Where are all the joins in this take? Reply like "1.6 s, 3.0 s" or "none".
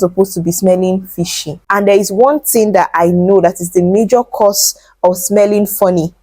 1.5 s